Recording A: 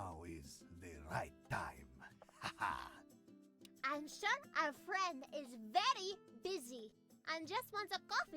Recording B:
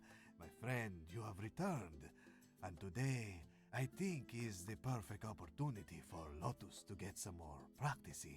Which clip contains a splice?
A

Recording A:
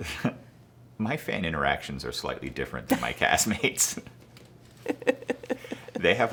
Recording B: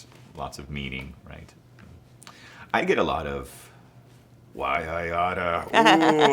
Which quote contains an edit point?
B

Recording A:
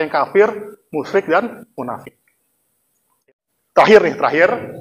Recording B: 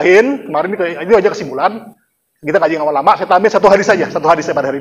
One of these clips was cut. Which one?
A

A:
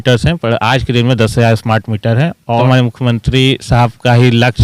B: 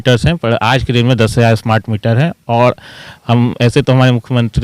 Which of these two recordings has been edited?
A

